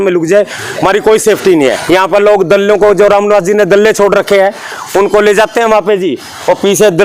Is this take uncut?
no; 1 cut; at 1.8 s

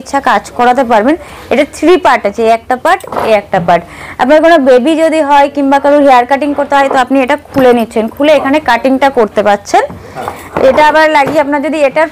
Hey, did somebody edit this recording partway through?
no; 0 cuts

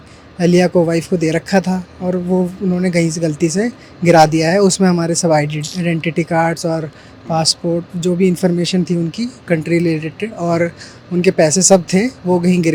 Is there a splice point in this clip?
no; 0 cuts

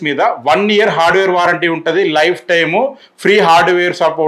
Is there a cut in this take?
no; 0 cuts

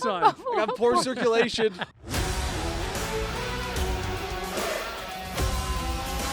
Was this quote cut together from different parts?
yes; 1 cut; at 1.9 s

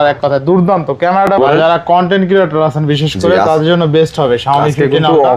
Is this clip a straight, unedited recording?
no; 1 cut; at 1.4 s

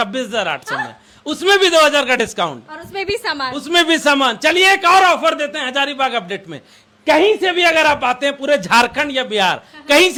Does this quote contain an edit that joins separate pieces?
no; 0 cuts

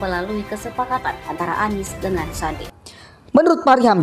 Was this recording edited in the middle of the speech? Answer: yes; 1 cut; at 2.6 s

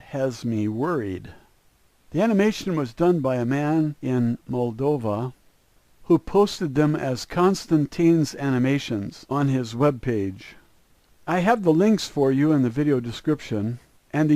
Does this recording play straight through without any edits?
no; 1 cut; at 11.1 s

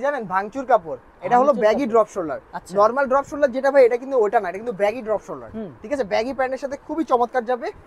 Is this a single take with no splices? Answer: yes; 0 cuts

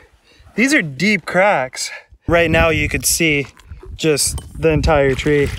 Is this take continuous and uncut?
no; 1 cut; at 2.1 s

